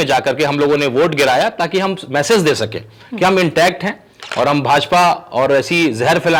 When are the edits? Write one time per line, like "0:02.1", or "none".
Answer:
none